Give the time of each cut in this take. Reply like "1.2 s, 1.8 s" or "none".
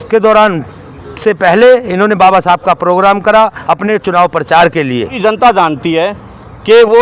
5.2 s